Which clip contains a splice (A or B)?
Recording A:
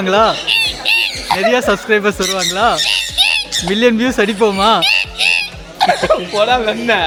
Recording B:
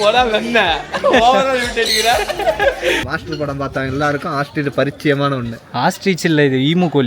B